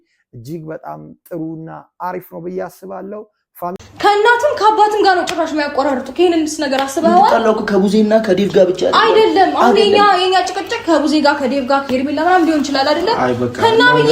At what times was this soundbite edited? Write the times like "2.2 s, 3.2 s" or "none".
3.8 s